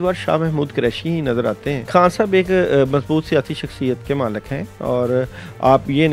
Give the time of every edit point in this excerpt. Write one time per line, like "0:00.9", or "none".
0:01.9